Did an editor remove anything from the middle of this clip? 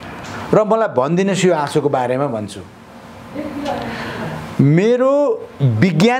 no; 0 cuts

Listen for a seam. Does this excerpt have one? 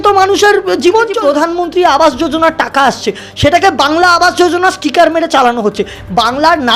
yes; 1 cut; at 1.2 s

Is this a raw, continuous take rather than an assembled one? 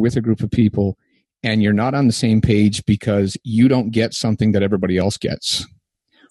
yes; 0 cuts

